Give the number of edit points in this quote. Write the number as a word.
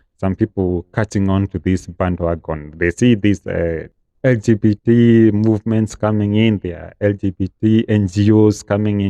zero